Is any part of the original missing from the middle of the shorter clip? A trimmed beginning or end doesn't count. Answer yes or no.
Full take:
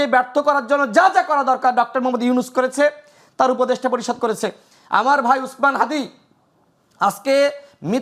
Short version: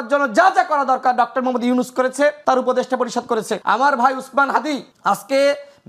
yes